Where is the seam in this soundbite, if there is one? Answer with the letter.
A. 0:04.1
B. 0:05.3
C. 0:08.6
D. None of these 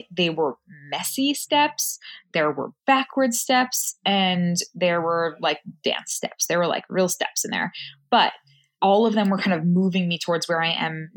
C